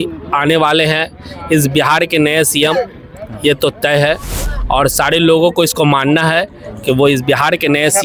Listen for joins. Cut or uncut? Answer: uncut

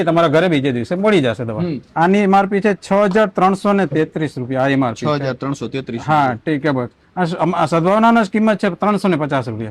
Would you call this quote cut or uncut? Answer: cut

